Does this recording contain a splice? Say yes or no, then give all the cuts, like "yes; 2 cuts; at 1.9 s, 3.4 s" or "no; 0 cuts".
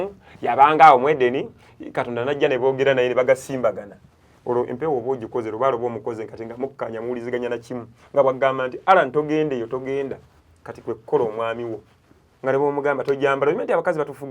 no; 0 cuts